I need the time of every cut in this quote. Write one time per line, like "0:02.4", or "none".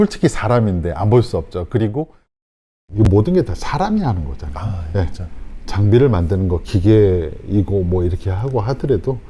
0:02.7